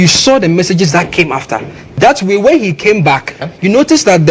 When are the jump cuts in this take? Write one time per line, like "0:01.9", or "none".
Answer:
0:01.8
0:03.4